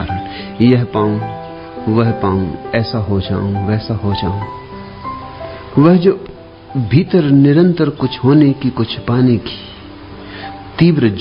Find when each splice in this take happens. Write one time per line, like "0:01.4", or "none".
none